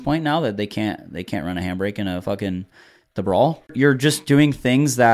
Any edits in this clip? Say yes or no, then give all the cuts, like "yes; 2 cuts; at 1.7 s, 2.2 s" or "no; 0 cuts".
yes; 1 cut; at 3.7 s